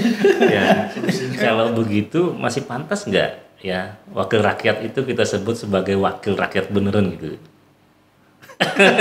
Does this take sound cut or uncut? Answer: cut